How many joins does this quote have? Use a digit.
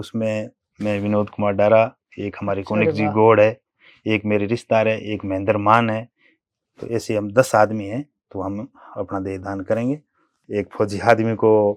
1